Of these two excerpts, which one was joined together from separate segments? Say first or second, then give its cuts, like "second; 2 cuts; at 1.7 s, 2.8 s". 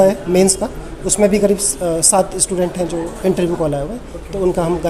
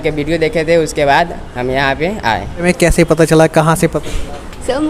second; 1 cut; at 2.6 s